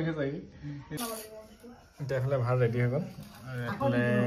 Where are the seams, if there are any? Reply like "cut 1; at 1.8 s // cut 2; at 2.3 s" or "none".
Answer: cut 1; at 1.0 s